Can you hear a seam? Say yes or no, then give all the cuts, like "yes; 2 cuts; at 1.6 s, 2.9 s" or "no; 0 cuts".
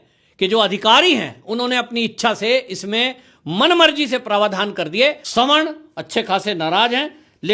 yes; 1 cut; at 5.2 s